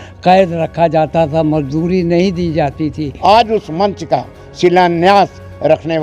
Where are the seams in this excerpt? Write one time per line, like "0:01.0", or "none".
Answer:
0:03.1